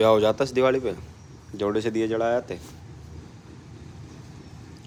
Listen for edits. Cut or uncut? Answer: uncut